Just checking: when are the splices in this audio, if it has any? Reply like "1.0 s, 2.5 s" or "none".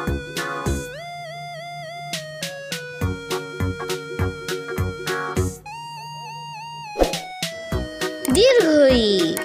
none